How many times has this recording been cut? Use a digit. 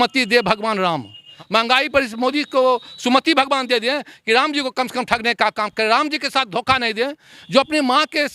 2